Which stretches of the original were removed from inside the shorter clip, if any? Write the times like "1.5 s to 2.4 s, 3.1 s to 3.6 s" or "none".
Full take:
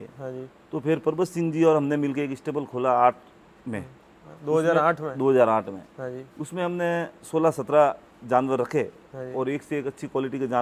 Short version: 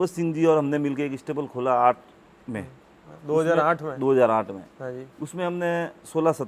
none